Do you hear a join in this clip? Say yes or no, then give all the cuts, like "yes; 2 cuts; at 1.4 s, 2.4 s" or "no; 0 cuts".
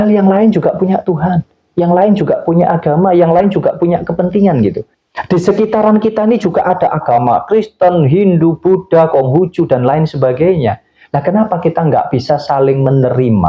yes; 1 cut; at 4.9 s